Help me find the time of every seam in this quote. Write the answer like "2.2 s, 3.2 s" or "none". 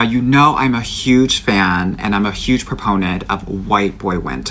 none